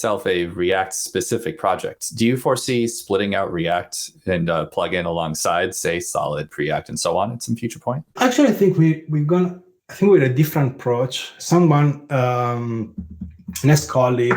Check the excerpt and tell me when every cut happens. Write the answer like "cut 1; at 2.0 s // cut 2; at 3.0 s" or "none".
cut 1; at 8.1 s

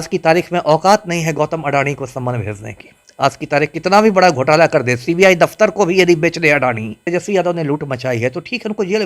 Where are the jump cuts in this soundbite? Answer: cut 1; at 7.0 s

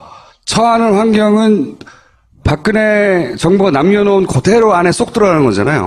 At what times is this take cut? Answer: cut 1; at 4.5 s

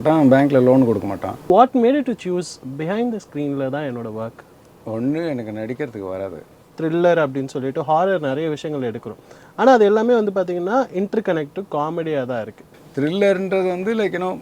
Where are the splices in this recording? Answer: cut 1; at 1.5 s // cut 2; at 6.6 s // cut 3; at 12.8 s

